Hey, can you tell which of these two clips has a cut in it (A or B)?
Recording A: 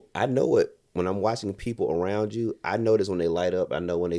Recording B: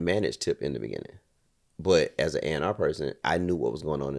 B